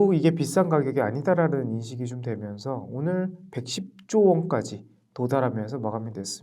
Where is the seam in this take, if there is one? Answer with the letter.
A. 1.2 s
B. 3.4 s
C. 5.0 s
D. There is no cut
B